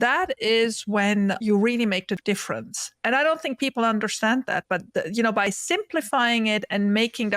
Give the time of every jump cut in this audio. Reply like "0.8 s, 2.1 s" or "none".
2.2 s